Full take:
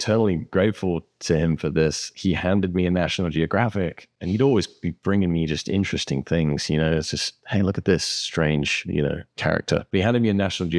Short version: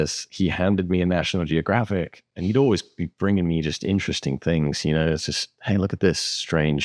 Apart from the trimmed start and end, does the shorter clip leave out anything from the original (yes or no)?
no